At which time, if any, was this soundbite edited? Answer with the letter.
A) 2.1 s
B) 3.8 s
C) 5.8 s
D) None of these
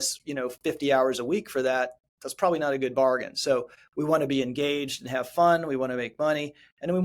B